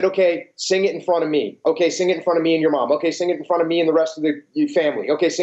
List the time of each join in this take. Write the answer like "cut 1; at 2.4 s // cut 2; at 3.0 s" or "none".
none